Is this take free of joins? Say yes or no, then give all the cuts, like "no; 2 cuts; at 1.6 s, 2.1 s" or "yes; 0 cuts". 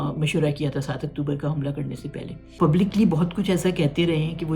no; 1 cut; at 2.5 s